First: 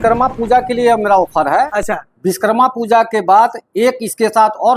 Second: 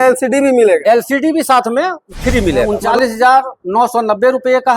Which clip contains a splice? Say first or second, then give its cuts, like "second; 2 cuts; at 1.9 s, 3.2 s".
second; 1 cut; at 2.7 s